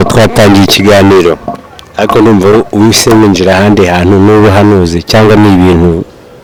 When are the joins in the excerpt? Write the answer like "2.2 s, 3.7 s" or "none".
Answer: none